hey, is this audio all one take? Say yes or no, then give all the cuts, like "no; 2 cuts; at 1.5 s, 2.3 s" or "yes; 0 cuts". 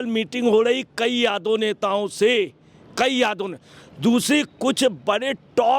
yes; 0 cuts